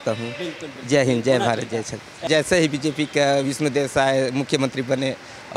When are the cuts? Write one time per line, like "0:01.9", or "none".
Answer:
0:02.2